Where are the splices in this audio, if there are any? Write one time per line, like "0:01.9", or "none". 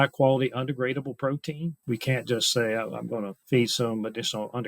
0:01.8
0:03.4